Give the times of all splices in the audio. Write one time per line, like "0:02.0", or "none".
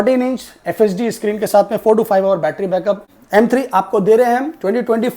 0:03.1